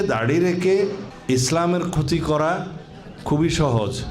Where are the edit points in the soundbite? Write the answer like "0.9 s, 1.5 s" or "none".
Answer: 1.1 s